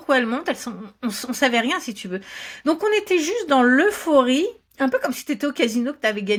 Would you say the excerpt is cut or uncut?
uncut